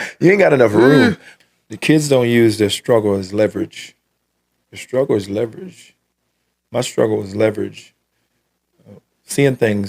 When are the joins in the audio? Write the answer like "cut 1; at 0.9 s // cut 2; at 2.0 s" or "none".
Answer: cut 1; at 1.3 s